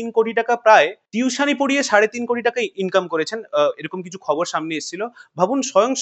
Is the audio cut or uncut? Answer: cut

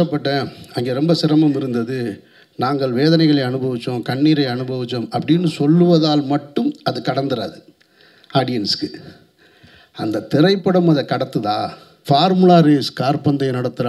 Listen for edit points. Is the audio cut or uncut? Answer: cut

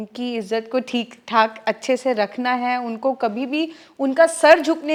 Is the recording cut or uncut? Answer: uncut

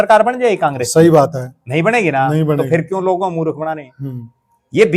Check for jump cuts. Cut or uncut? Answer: uncut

